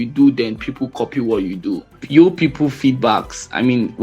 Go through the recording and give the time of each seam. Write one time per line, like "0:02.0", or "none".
0:02.0